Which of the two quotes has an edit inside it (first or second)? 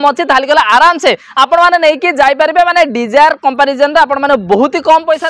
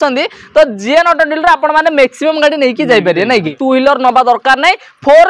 second